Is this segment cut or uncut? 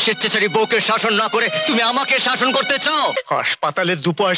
cut